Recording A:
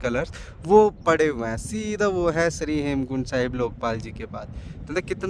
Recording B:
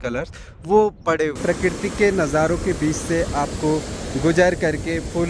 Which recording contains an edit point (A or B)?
B